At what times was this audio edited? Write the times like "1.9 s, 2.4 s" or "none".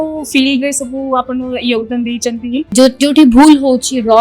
2.7 s